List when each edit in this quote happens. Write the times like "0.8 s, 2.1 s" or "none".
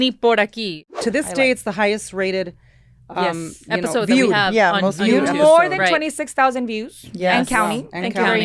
1.0 s